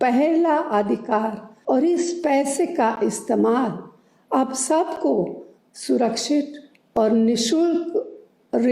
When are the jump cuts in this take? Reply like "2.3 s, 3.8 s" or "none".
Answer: 1.5 s